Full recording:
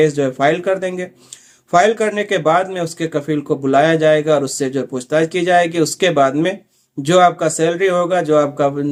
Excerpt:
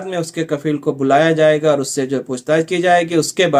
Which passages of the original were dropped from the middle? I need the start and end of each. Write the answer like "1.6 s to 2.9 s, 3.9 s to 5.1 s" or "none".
none